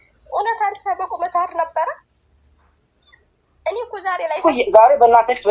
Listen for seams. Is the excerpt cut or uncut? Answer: cut